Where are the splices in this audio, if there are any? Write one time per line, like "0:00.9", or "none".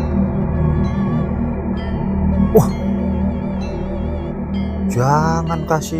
none